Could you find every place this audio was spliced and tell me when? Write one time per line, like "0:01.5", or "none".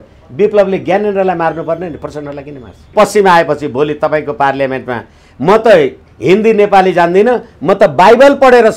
0:02.9